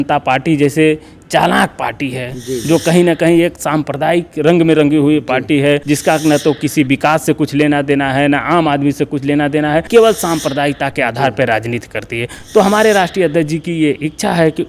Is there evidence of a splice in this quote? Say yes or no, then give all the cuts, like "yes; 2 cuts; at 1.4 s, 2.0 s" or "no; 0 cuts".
yes; 2 cuts; at 5.8 s, 9.9 s